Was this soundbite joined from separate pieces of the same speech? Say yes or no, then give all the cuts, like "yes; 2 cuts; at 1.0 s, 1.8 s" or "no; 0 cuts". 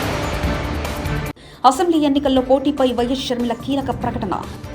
no; 0 cuts